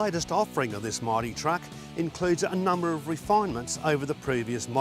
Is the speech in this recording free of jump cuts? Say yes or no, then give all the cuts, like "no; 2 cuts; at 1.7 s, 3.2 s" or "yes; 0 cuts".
yes; 0 cuts